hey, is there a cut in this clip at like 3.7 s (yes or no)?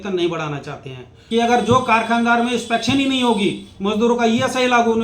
no